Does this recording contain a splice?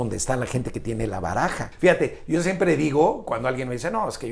yes; 1 cut; at 1.7 s

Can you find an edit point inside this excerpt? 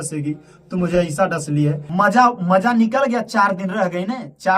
yes; 1 cut; at 1.8 s

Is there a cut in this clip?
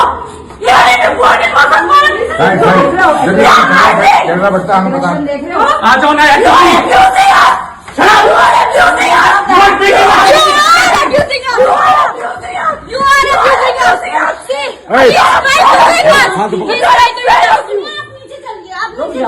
yes; 1 cut; at 0.9 s

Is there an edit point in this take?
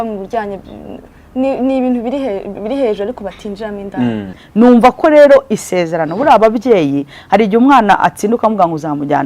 yes; 1 cut; at 4.4 s

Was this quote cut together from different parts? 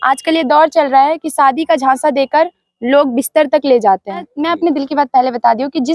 yes; 1 cut; at 4.4 s

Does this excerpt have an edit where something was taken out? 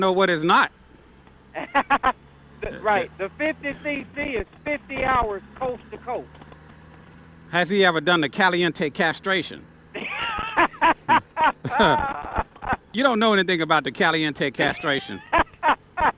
yes; 1 cut; at 12.9 s

